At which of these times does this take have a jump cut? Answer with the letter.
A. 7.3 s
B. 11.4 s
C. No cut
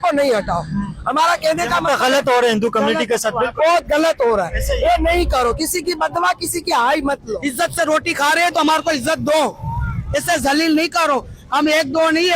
A